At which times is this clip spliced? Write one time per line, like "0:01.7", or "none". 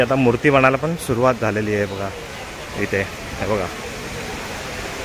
none

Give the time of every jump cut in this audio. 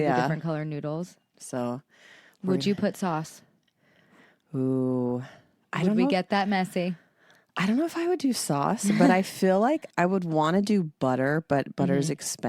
0:01.3

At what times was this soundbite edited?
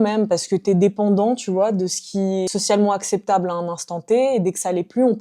0:02.5

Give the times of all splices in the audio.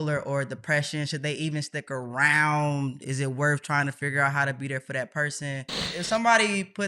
0:05.9

